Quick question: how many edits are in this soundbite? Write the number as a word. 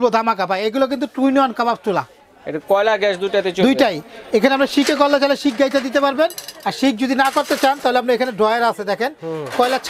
zero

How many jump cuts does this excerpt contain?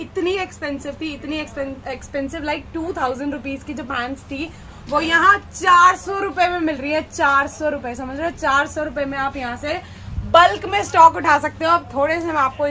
zero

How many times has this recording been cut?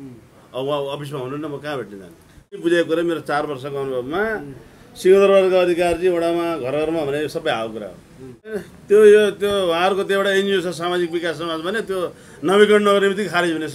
two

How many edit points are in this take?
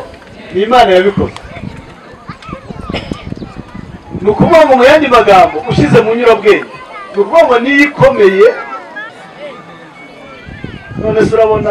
one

